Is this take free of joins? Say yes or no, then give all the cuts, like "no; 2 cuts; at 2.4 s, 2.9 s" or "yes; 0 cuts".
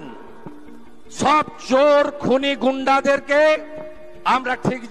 yes; 0 cuts